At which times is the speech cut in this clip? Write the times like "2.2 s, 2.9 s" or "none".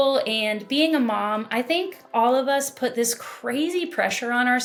none